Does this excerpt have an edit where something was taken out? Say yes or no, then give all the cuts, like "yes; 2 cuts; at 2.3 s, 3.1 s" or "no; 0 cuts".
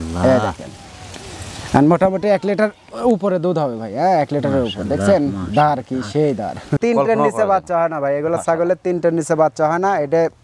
yes; 1 cut; at 6.8 s